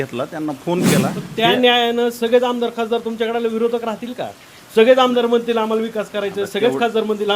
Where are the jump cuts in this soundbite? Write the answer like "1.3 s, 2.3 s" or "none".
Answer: 1.2 s